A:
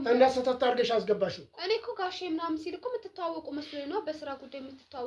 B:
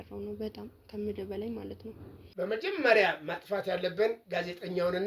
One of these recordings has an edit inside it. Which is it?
B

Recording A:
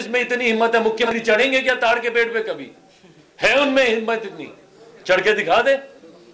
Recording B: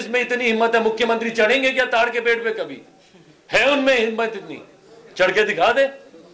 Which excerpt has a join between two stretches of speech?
A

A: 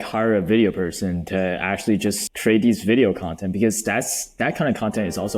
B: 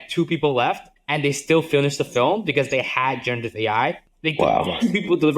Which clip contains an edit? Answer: B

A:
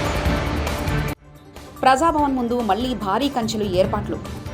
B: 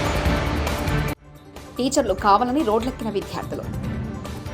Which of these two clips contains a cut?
B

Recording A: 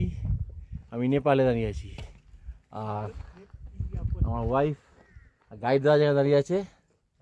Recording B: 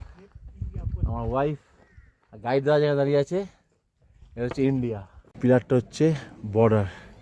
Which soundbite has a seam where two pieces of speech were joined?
B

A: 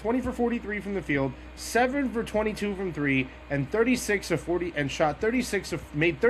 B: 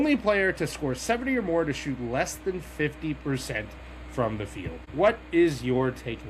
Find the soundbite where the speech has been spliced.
B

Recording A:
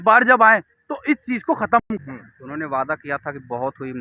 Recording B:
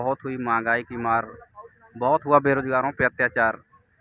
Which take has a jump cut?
A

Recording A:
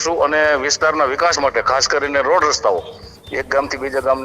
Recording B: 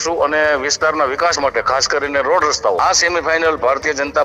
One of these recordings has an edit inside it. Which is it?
B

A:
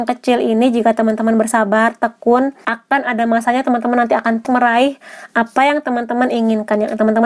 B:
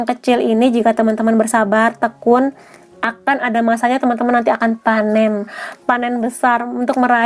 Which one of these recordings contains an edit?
A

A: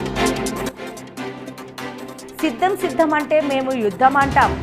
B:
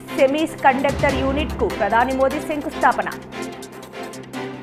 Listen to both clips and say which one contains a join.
A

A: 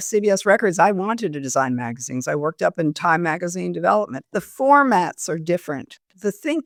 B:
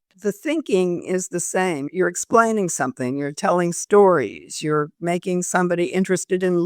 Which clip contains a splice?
B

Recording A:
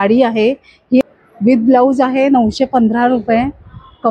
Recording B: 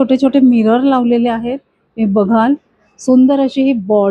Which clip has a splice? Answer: A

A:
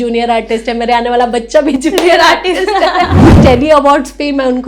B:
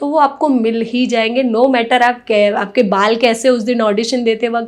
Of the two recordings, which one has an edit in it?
A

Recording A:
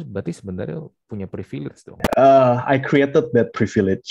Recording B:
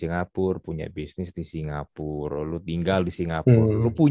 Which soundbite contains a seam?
A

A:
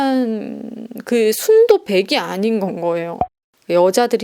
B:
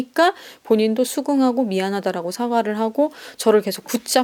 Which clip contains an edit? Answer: A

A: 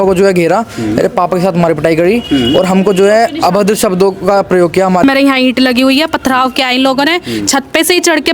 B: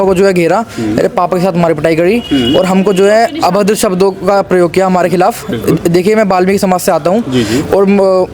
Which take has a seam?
A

